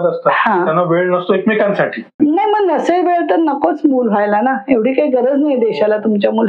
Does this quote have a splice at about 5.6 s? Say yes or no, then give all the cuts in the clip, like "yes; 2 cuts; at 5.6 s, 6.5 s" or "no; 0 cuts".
no; 1 cut; at 2.1 s